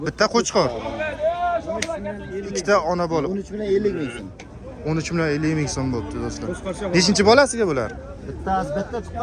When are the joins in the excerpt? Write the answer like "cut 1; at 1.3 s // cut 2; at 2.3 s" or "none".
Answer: none